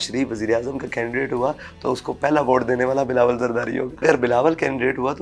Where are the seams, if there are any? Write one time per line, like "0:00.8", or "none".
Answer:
0:04.0

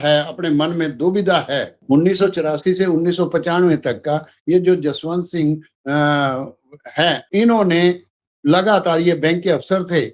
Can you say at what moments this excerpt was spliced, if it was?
0:01.7
0:07.2

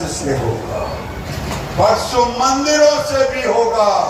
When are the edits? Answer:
none

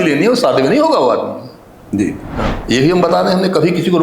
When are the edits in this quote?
0:02.6

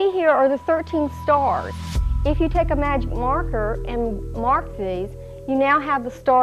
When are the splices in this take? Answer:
none

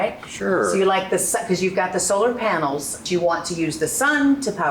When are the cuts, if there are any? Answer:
0:03.0

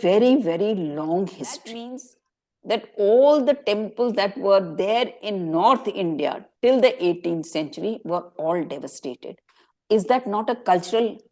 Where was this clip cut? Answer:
0:01.7

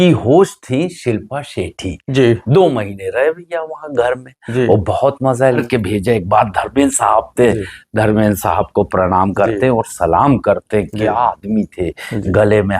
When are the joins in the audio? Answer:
0:05.6

